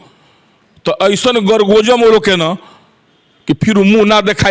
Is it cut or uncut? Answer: uncut